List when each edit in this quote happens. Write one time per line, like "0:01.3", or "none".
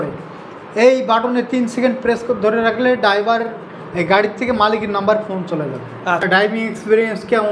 0:06.2